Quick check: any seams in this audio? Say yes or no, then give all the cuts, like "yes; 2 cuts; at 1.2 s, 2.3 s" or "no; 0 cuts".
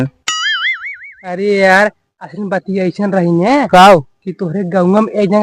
no; 0 cuts